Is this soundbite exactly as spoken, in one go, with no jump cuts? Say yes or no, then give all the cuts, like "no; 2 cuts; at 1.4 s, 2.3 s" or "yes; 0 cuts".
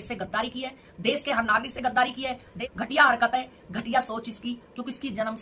no; 1 cut; at 2.5 s